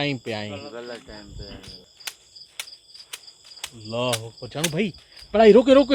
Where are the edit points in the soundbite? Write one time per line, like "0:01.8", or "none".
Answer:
0:01.8